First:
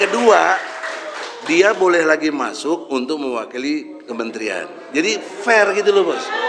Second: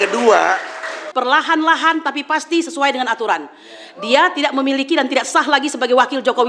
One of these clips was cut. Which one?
second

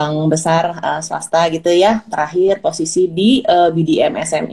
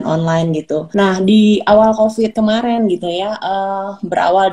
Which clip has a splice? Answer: second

